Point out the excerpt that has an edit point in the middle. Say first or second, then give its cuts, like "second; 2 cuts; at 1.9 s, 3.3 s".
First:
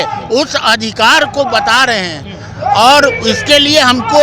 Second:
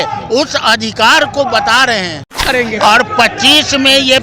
second; 1 cut; at 2.4 s